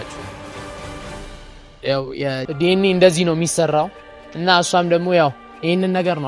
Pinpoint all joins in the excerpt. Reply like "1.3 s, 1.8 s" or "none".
2.4 s